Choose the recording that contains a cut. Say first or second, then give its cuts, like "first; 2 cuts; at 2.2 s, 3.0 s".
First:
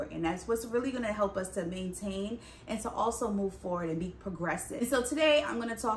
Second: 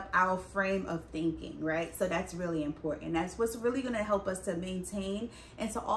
first; 1 cut; at 4.7 s